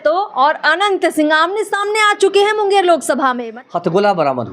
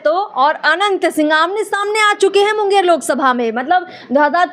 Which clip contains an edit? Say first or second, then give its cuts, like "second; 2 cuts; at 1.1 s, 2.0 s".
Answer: first; 1 cut; at 3.5 s